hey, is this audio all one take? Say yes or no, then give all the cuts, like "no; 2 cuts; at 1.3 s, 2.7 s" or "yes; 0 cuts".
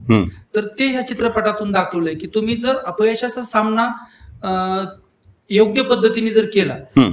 yes; 0 cuts